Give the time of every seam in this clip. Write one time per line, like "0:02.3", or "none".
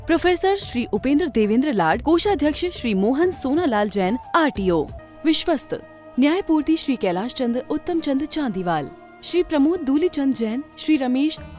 0:05.0